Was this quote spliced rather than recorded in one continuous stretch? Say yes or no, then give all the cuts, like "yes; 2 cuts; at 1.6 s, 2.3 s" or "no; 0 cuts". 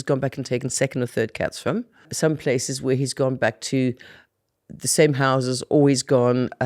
yes; 1 cut; at 2.1 s